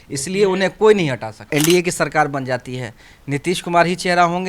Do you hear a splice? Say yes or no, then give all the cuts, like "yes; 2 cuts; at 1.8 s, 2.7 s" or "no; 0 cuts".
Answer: yes; 1 cut; at 1.3 s